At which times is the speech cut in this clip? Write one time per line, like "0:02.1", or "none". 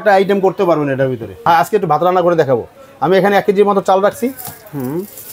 0:01.4